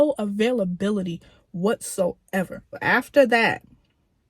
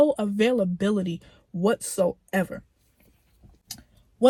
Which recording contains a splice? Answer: first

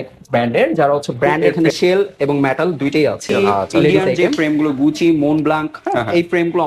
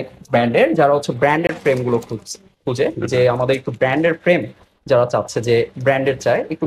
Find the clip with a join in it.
first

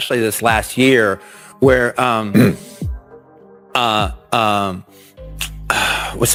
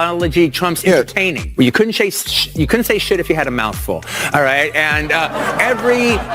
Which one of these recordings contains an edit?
second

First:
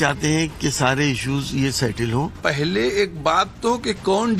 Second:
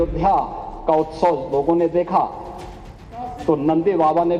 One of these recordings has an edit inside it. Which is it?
first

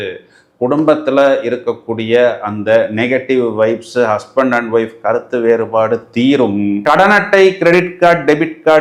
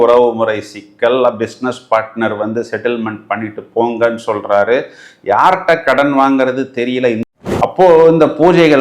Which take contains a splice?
second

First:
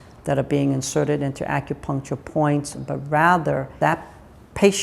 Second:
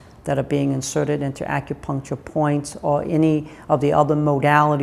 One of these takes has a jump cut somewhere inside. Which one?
first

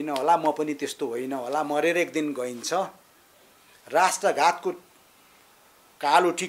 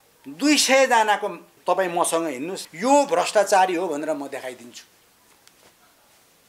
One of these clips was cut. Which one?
second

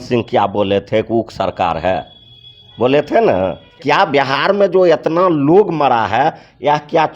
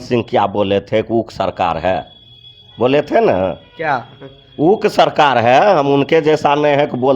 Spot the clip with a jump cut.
first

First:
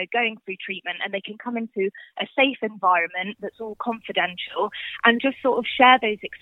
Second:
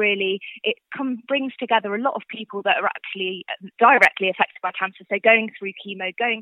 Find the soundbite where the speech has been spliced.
second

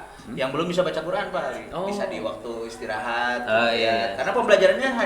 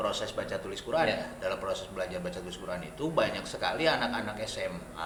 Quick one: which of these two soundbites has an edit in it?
first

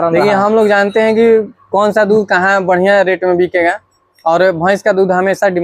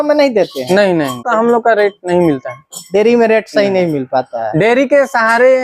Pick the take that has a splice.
second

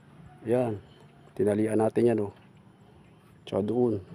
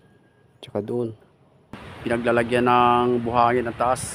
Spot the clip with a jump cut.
second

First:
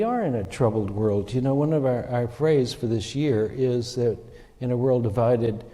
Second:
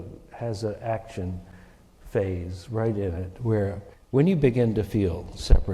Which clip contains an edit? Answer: second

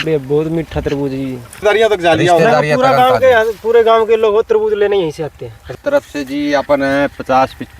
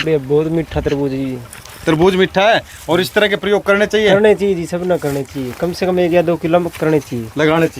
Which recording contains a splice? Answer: first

